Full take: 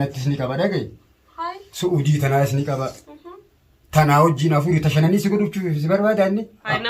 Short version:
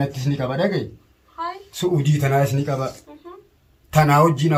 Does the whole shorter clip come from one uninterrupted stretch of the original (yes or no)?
yes